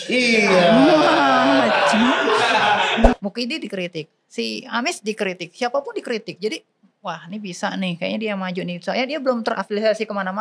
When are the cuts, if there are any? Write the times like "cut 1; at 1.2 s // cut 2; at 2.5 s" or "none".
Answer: cut 1; at 3.1 s